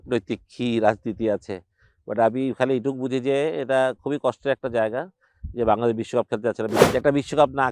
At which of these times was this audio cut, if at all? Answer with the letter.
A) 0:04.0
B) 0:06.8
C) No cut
B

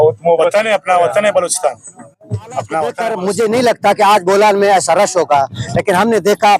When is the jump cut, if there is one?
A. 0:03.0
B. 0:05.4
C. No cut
A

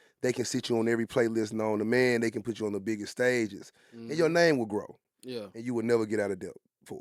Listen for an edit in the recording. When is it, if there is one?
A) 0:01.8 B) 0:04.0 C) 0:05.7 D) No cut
D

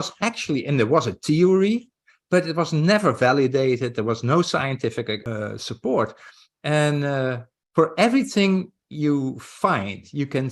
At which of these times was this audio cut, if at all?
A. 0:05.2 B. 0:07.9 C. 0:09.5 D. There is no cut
A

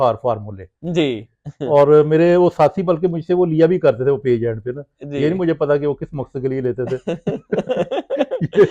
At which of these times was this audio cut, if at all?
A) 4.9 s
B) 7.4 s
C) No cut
C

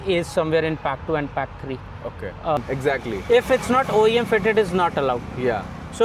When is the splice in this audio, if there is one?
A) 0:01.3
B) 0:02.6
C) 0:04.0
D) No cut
B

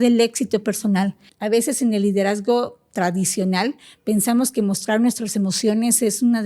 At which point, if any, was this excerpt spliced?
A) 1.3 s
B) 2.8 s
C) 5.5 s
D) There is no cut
A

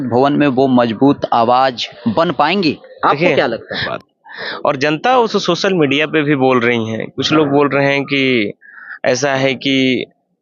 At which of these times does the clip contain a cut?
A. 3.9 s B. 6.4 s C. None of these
A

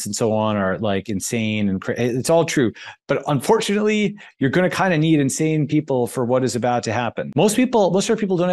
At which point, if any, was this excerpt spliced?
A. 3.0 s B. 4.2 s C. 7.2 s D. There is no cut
C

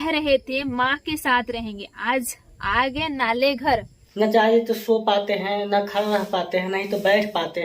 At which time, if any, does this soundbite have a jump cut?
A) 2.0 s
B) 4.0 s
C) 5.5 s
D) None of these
B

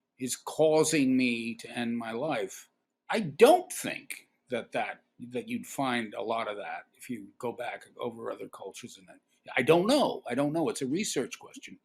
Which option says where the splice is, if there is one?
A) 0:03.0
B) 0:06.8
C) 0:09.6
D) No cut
D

